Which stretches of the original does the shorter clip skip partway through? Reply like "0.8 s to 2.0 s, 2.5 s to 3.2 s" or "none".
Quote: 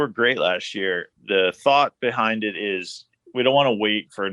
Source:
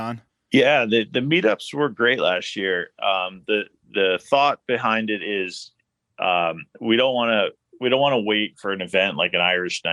2.9 s to 3.8 s, 5.9 s to 7.7 s